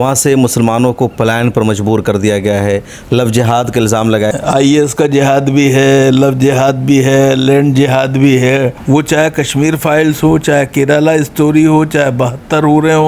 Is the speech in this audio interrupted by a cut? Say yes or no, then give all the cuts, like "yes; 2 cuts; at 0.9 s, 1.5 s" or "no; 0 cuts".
yes; 2 cuts; at 4.3 s, 8.8 s